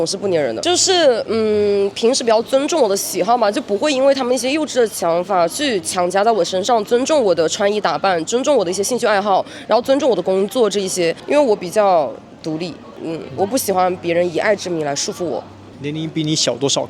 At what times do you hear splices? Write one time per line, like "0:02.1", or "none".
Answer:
none